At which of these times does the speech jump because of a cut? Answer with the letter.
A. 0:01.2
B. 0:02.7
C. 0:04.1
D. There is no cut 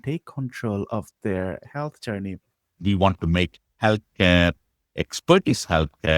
B